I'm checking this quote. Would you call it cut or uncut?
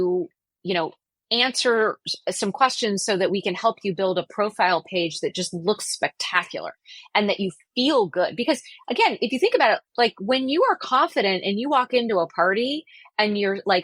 uncut